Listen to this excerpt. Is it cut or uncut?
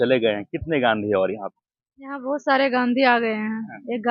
uncut